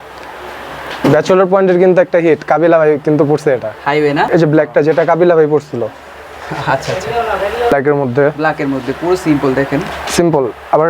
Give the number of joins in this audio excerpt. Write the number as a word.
two